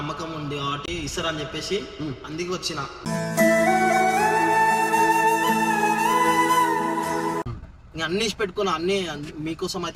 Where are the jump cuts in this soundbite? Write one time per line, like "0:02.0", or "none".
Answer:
none